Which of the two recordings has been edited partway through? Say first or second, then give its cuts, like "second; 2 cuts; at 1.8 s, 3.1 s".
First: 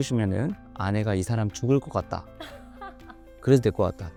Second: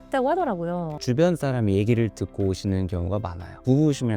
second; 1 cut; at 0.9 s